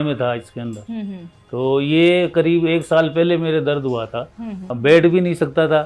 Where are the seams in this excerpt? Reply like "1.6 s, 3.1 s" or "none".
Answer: 4.7 s